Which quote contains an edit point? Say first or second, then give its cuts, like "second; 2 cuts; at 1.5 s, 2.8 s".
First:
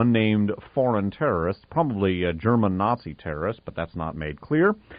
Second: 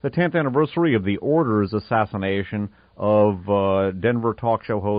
first; 1 cut; at 2.6 s